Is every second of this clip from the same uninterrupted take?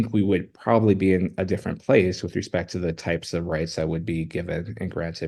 yes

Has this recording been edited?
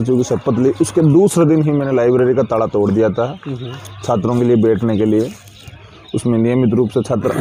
no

